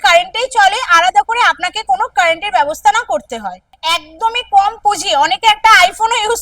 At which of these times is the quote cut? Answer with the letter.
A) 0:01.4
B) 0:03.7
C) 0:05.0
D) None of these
B